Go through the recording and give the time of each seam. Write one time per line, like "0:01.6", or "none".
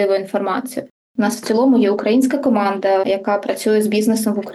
0:01.1
0:03.0